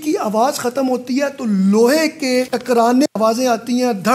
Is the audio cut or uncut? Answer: uncut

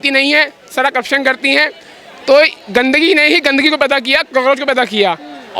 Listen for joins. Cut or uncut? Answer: uncut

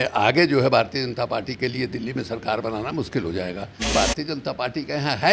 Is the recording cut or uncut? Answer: cut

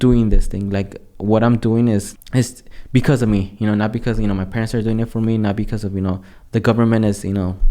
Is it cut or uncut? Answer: cut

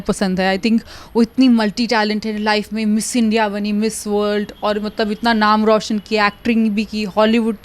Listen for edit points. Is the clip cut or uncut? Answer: uncut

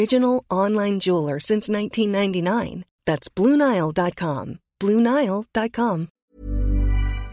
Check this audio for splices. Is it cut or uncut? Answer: cut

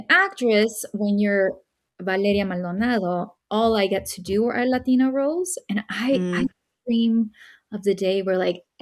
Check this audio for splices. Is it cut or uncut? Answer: uncut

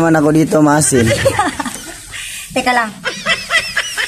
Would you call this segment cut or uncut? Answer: cut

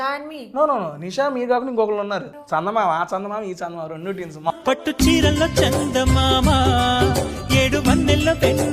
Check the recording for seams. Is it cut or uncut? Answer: cut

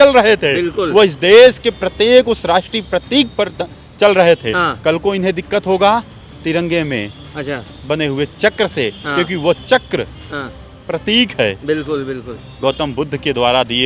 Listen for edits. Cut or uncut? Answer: uncut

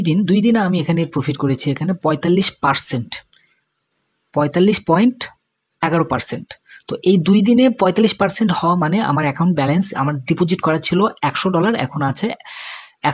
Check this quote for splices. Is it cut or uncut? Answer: uncut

